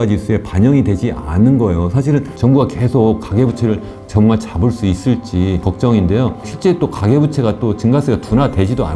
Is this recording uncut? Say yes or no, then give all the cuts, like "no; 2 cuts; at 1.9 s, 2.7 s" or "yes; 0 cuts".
no; 3 cuts; at 2.3 s, 5.7 s, 6.5 s